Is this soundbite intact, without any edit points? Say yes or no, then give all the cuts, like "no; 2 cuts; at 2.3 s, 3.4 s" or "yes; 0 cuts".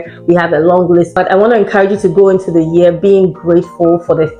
no; 1 cut; at 1.1 s